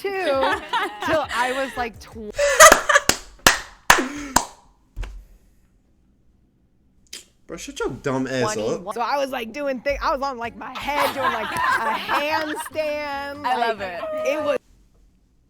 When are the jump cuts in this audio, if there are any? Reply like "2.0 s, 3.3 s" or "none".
8.9 s